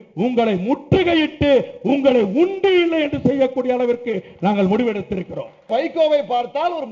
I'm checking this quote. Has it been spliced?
yes; 1 cut; at 5.7 s

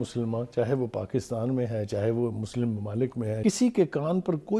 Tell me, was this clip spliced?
yes; 1 cut; at 3.3 s

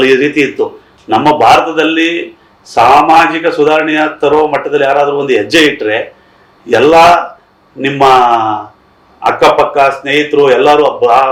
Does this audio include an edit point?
no; 0 cuts

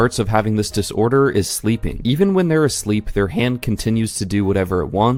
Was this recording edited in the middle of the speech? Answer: no; 0 cuts

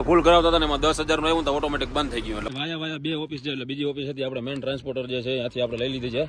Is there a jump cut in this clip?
yes; 1 cut; at 2.5 s

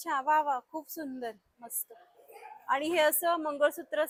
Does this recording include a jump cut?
no; 0 cuts

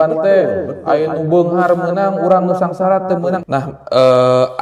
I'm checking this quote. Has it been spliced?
yes; 1 cut; at 3.4 s

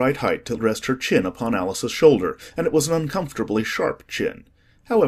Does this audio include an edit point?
no; 0 cuts

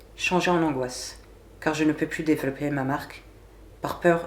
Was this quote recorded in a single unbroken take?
yes; 0 cuts

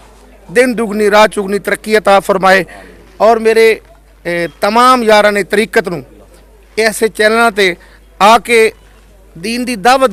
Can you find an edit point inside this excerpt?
no; 0 cuts

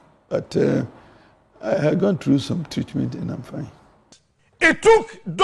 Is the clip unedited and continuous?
no; 1 cut; at 4.0 s

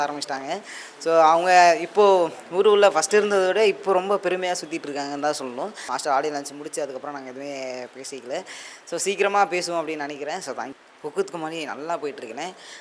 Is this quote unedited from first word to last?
no; 2 cuts; at 5.8 s, 10.7 s

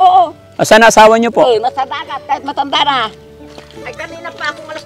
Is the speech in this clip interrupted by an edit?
yes; 1 cut; at 3.4 s

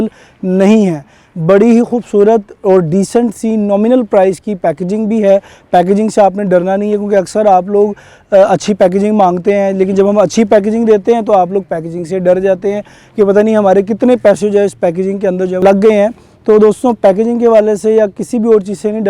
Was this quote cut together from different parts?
no; 0 cuts

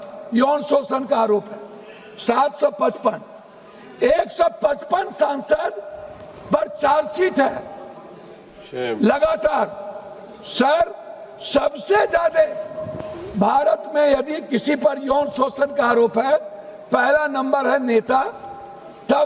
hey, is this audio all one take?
yes; 0 cuts

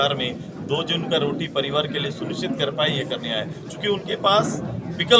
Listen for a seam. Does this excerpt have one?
no; 0 cuts

